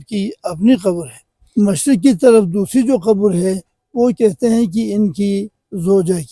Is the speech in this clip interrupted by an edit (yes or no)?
no